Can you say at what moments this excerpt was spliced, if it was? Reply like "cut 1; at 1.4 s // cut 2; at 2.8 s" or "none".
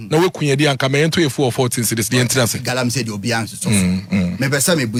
none